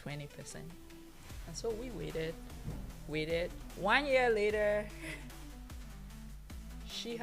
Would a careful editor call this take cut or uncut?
cut